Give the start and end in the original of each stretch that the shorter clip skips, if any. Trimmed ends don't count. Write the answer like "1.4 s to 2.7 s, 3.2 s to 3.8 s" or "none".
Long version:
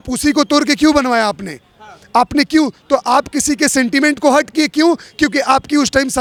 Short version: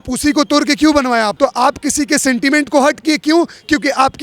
1.3 s to 2.8 s